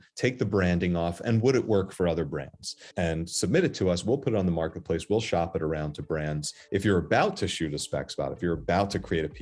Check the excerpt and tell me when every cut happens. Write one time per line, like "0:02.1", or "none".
0:02.9
0:06.5